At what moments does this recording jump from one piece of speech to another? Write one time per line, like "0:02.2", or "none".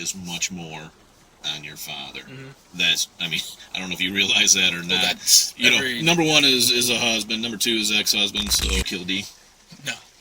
0:08.8